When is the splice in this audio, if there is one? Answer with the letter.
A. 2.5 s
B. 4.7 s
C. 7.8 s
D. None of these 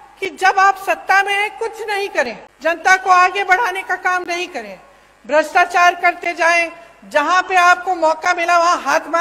A